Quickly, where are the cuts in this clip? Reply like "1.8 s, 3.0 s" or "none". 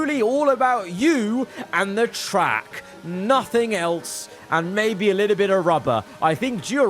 none